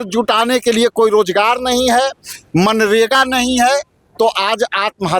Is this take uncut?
yes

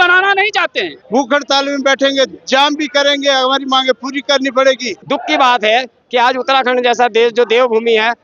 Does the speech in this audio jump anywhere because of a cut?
yes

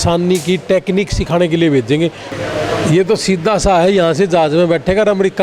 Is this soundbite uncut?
no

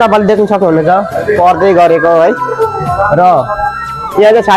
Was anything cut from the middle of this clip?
no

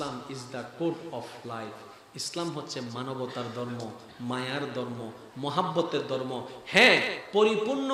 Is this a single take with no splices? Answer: yes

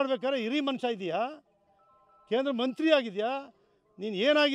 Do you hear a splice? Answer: no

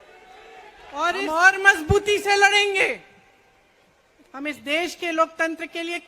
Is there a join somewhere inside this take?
yes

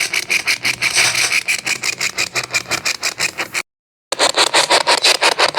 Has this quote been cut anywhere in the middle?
yes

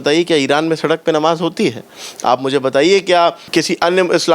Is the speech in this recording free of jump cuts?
no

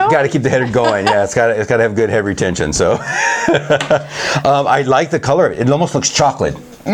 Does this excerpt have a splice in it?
no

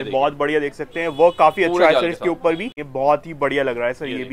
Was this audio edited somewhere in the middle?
yes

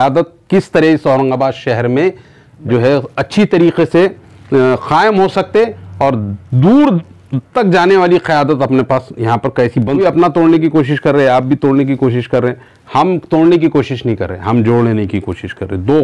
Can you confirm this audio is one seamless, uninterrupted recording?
no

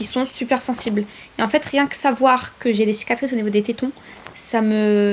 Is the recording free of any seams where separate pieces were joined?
yes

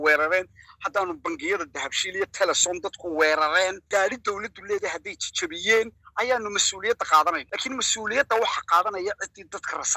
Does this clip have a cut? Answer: yes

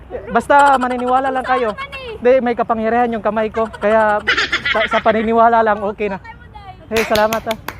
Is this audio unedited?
no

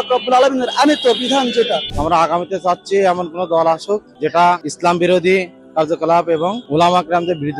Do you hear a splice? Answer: yes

